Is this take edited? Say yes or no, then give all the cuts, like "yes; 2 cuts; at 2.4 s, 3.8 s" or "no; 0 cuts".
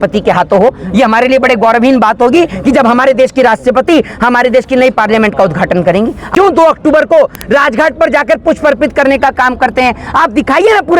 yes; 1 cut; at 6.3 s